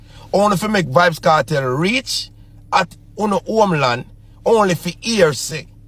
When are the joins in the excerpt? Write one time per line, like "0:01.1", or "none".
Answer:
none